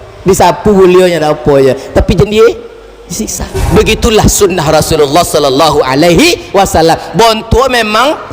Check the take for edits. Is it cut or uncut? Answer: cut